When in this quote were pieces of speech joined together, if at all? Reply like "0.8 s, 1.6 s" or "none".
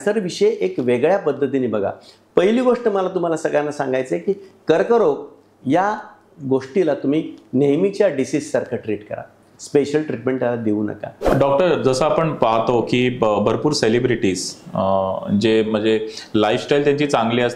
11.3 s